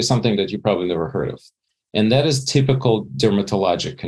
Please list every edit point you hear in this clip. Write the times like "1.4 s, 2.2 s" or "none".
3.1 s